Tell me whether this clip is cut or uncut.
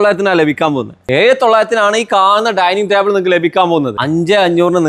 cut